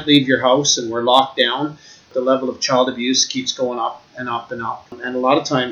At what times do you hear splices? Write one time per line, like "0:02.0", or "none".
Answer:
0:02.1
0:05.0